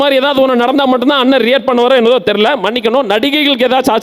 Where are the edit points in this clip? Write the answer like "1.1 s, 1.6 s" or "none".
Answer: none